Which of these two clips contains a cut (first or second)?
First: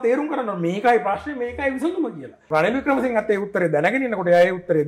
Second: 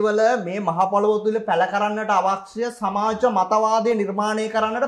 first